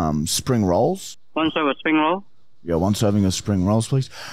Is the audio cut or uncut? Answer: cut